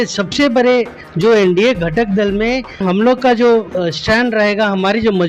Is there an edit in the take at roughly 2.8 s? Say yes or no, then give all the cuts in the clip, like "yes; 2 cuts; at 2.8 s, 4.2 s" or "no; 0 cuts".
yes; 2 cuts; at 1.0 s, 2.8 s